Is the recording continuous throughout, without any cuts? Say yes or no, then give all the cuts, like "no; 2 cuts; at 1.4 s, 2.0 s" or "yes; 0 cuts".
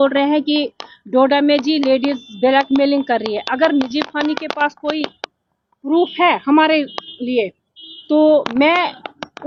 yes; 0 cuts